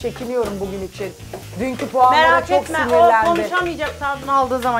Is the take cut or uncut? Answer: uncut